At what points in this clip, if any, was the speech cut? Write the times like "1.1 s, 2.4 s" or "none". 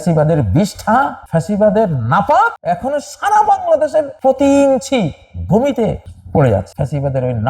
1.2 s, 2.6 s, 4.1 s, 6.1 s, 6.7 s